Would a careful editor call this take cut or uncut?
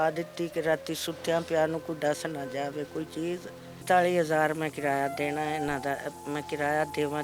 cut